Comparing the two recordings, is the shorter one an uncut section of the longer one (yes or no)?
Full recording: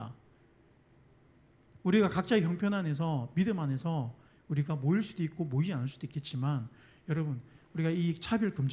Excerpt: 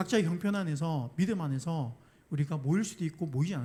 yes